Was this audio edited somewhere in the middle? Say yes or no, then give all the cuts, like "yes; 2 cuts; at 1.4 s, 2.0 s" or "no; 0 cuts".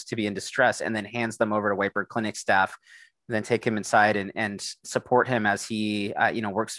no; 0 cuts